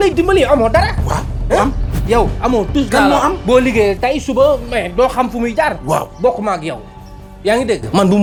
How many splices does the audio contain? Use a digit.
0